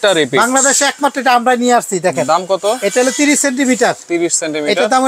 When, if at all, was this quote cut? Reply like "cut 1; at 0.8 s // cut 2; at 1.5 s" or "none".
none